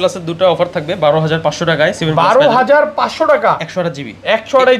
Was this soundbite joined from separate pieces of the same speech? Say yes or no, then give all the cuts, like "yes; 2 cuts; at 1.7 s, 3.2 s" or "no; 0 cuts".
no; 0 cuts